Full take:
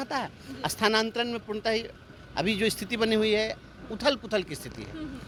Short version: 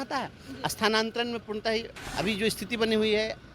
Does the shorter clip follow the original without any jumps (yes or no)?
no